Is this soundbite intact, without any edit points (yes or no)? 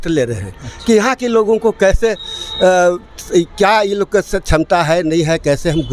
yes